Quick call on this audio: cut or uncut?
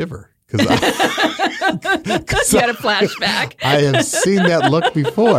uncut